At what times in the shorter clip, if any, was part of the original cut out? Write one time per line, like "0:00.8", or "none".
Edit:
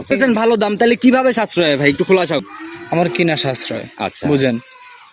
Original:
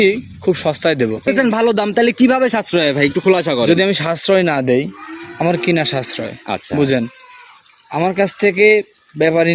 0:02.4